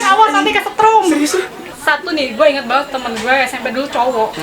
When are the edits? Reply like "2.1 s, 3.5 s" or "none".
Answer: 1.6 s

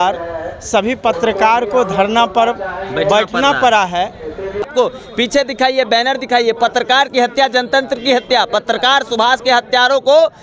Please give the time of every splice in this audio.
4.6 s

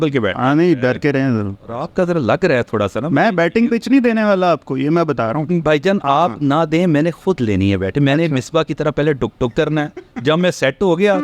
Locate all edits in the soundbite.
none

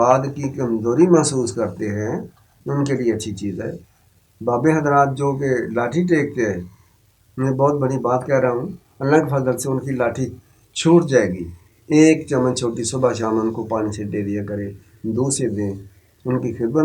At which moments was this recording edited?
none

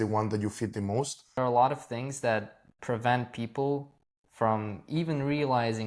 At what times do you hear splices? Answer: 1.4 s

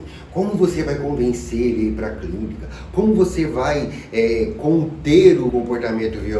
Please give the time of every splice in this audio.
5.5 s

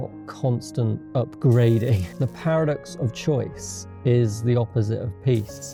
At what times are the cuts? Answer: none

